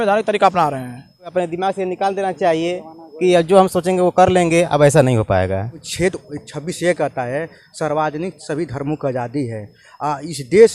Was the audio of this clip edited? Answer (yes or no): yes